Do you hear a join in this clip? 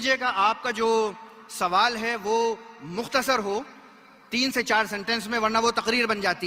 no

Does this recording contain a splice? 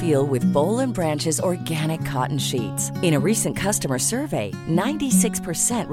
no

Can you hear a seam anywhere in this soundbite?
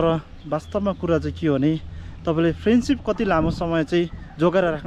no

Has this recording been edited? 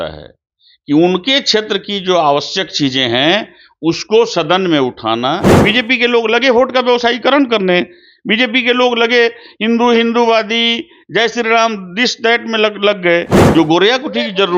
yes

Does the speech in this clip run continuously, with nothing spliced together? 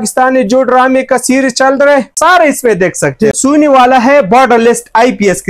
no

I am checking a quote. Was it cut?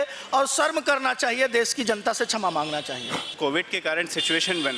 yes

